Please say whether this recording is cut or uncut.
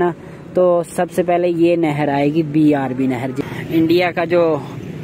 cut